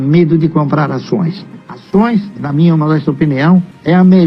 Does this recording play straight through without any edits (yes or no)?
no